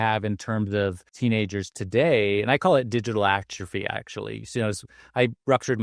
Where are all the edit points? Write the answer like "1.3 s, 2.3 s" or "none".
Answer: 1.1 s